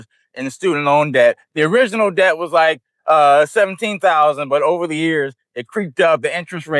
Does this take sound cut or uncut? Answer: uncut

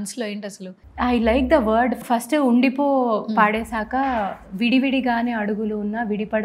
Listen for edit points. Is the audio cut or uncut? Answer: cut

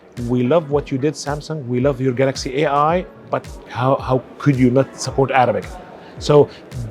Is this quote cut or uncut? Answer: cut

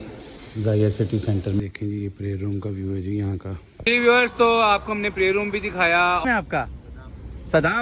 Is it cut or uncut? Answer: cut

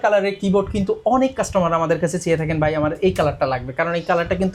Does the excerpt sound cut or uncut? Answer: uncut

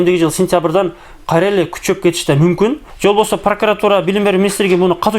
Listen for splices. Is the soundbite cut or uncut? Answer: cut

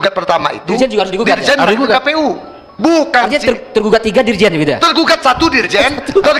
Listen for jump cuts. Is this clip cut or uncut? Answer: uncut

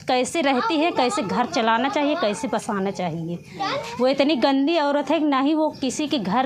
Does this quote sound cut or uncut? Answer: uncut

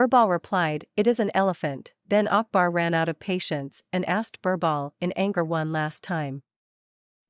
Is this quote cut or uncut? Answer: cut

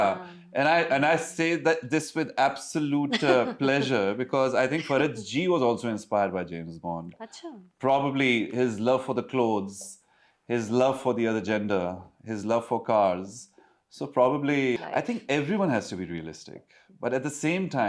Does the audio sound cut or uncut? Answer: cut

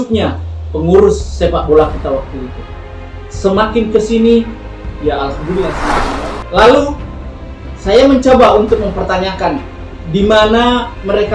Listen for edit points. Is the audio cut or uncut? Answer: cut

